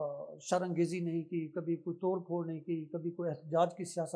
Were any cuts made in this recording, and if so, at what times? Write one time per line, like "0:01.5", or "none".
none